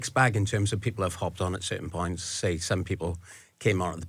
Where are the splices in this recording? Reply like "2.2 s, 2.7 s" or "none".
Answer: none

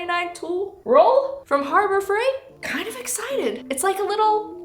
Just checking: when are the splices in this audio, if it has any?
2.5 s

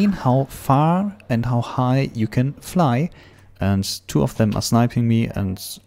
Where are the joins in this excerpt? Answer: 3.3 s

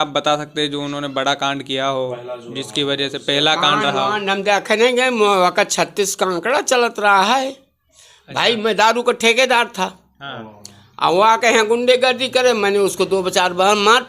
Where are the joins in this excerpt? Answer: none

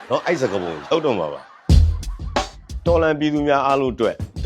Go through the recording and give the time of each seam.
1.5 s

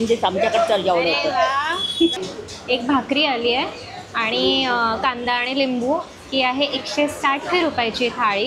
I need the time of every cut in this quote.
2.1 s

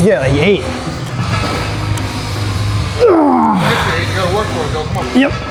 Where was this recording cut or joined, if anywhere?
none

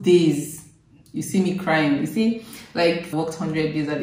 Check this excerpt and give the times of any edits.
2.8 s

